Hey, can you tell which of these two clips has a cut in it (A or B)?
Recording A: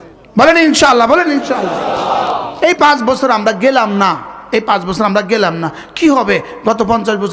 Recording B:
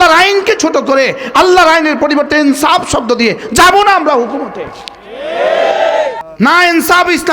B